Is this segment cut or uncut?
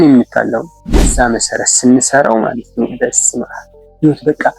cut